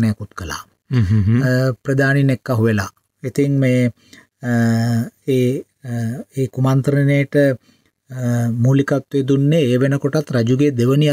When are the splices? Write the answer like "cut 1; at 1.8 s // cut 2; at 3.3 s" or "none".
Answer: none